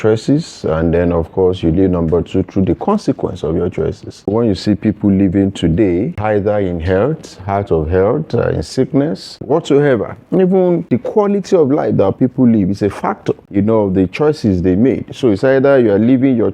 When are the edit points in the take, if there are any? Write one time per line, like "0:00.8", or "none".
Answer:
0:04.3
0:06.2
0:09.4
0:10.9
0:13.4